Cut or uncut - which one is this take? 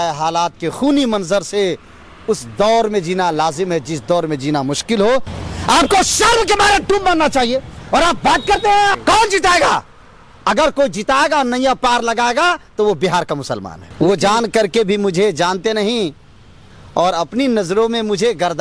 cut